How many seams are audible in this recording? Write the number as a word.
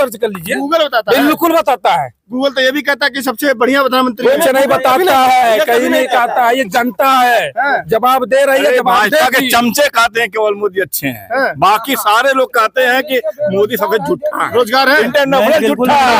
zero